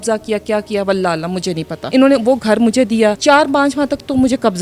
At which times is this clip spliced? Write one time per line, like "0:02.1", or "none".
0:01.8
0:03.2